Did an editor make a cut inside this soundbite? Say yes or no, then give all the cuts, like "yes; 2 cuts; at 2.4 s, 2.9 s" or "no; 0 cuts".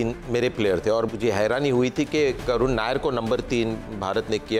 yes; 1 cut; at 1.1 s